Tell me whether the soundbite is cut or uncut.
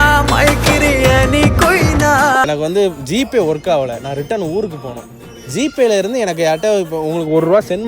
cut